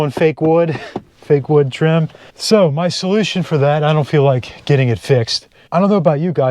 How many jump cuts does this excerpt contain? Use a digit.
2